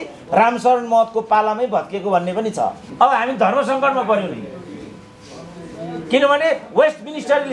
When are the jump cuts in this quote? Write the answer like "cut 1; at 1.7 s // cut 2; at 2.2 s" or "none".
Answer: cut 1; at 2.8 s